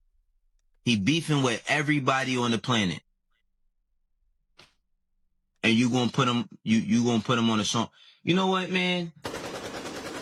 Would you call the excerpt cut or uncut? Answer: uncut